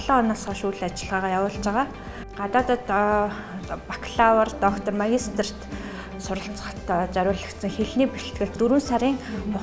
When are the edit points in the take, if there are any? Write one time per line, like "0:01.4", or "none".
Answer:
0:02.3
0:08.6